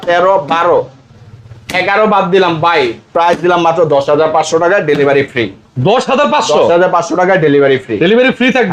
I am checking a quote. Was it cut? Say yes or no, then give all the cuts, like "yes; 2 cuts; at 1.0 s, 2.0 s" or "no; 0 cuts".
no; 0 cuts